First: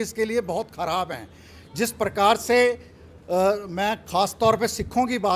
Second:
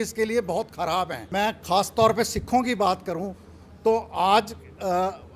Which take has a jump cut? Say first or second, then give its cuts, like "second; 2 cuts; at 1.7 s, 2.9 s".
second; 1 cut; at 1.2 s